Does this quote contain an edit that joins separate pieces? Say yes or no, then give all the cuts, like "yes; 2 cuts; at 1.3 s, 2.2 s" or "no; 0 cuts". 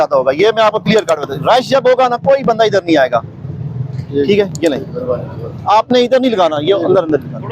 no; 0 cuts